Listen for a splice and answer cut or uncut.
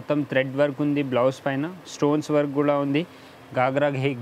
uncut